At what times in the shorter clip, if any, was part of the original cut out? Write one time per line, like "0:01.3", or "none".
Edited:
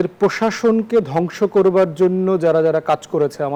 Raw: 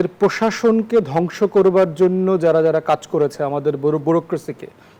none